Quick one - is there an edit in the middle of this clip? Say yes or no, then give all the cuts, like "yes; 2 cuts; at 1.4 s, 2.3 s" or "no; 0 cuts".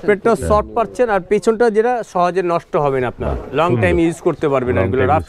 no; 0 cuts